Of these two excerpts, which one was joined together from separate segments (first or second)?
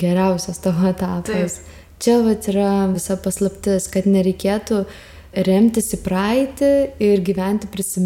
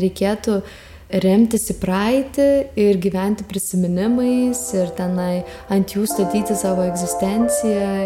first